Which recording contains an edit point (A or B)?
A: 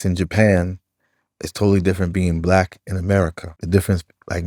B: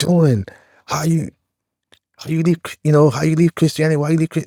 A